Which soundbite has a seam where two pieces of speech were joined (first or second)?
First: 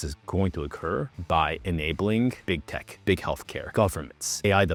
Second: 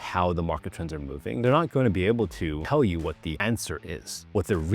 second